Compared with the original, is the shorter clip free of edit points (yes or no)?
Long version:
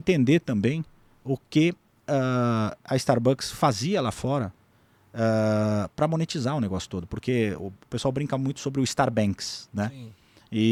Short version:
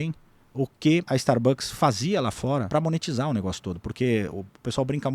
no